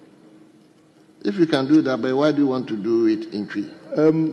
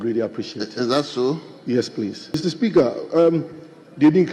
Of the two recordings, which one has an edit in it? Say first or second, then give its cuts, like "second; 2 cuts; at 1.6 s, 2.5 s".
second; 1 cut; at 2.4 s